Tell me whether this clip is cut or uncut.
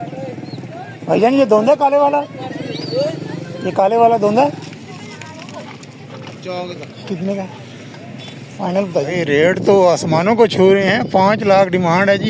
cut